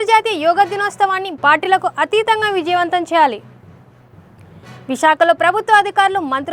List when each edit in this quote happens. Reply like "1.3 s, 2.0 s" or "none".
none